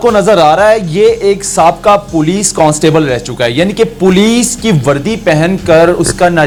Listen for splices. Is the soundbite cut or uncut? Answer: uncut